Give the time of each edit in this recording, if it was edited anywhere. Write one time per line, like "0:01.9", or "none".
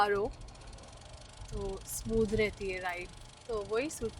0:03.1